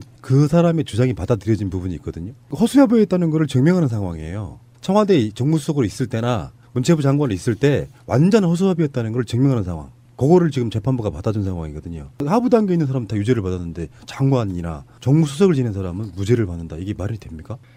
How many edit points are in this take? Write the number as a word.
zero